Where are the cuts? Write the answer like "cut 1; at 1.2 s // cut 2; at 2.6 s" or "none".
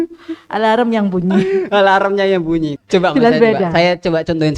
cut 1; at 2.7 s